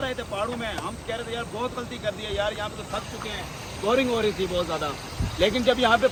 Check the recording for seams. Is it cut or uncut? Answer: uncut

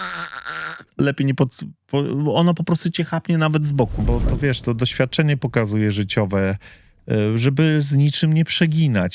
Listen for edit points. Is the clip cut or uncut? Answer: cut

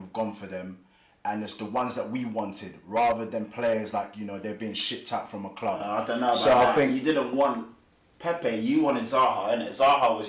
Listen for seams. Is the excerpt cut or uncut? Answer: uncut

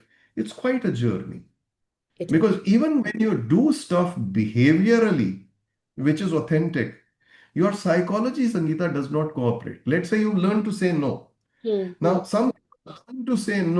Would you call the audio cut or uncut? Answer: uncut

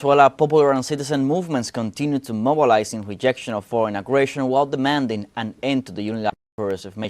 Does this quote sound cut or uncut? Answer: cut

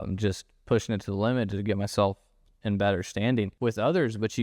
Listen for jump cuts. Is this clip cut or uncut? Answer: cut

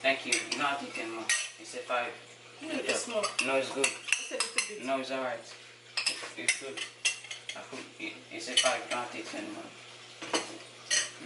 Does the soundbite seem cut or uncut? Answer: uncut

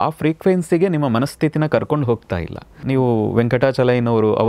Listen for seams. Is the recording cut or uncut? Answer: cut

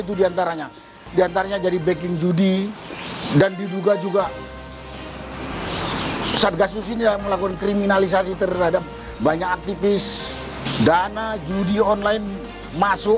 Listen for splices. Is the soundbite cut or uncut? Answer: cut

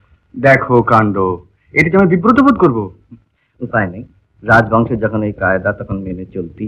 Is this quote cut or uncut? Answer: uncut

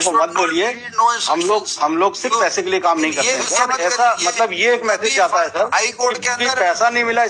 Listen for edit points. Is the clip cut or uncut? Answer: cut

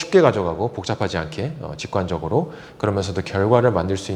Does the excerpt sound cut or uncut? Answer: uncut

